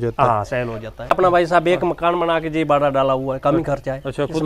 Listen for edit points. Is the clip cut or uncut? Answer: cut